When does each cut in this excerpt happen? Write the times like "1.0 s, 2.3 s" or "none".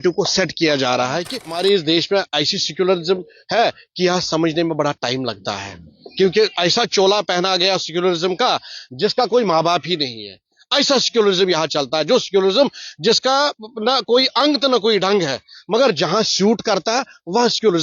1.4 s